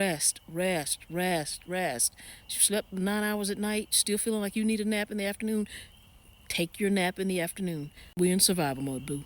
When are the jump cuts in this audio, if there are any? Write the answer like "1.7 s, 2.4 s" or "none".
8.1 s